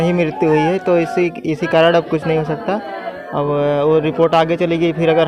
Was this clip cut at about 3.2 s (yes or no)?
no